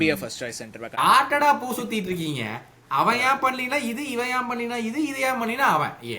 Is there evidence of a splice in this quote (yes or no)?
yes